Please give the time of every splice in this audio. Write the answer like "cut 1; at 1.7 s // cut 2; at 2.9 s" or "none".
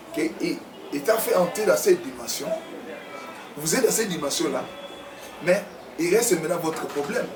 none